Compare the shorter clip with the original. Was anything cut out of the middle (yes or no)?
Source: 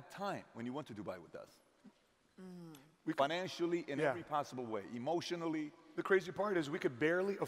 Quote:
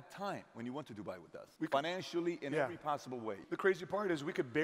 yes